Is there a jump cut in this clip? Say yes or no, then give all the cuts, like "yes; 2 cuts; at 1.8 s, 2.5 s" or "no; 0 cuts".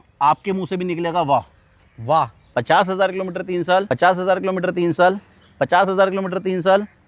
yes; 2 cuts; at 2.4 s, 3.9 s